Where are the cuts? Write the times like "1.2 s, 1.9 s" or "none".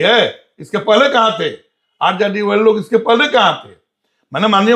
none

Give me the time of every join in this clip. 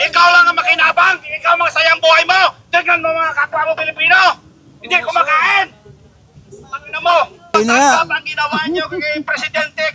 7.6 s

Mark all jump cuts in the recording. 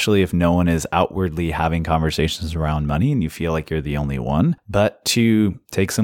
4.6 s

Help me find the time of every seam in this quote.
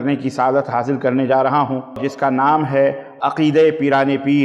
2.1 s

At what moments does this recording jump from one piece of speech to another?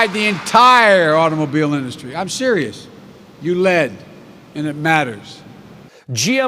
5.6 s

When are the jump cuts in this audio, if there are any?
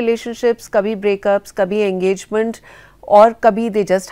none

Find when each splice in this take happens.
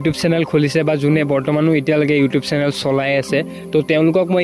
none

